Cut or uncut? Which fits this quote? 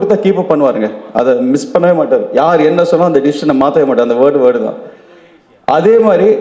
uncut